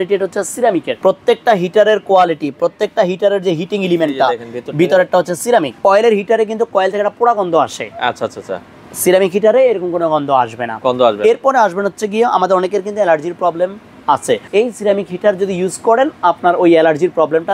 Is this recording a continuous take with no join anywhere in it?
no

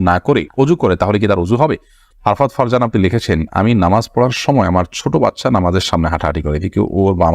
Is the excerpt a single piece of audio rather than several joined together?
no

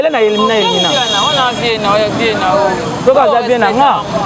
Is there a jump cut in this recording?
no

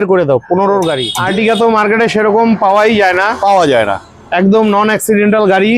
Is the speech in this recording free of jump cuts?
no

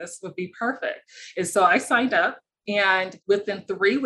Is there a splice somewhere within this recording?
yes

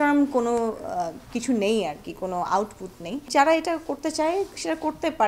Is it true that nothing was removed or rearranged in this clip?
yes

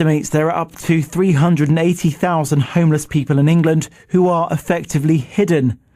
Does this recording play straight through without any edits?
no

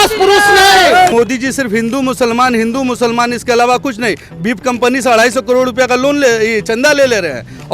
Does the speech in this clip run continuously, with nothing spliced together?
no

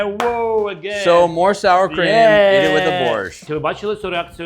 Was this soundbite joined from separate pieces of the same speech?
yes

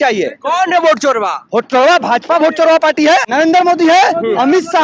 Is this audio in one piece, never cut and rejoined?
no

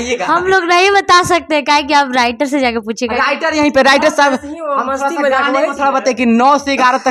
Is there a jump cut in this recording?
no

